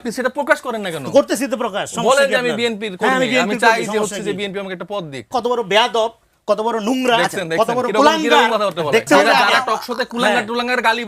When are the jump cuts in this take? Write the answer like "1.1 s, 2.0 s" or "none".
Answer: 5.3 s, 9.1 s